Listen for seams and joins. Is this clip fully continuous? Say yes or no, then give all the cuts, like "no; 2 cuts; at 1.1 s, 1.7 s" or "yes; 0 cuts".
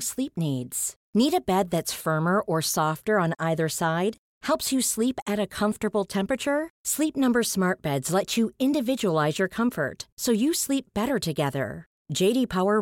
yes; 0 cuts